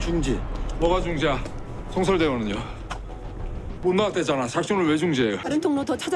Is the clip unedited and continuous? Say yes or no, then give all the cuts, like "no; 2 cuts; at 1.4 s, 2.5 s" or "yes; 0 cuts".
yes; 0 cuts